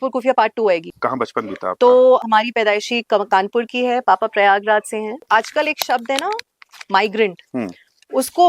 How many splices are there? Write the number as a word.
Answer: three